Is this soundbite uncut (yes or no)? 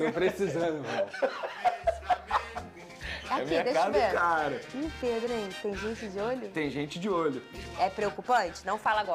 yes